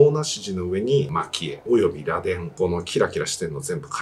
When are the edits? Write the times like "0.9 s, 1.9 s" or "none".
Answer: 1.2 s, 2.5 s